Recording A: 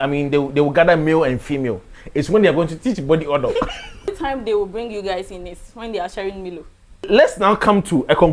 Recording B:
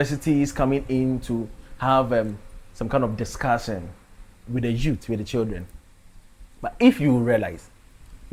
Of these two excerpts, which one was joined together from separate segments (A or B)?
A